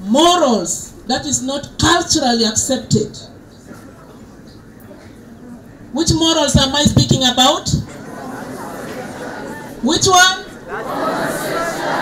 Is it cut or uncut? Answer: uncut